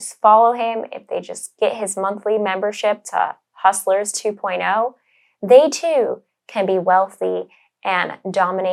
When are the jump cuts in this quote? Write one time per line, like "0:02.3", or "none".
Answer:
none